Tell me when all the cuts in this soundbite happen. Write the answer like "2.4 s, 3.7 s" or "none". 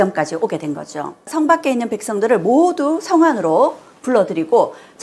1.3 s